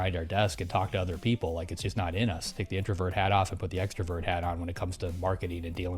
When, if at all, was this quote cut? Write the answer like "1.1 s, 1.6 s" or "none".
2.5 s